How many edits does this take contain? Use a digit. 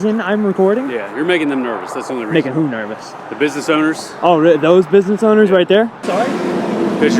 1